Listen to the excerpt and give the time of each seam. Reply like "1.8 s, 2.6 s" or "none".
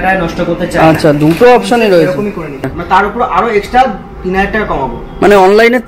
2.8 s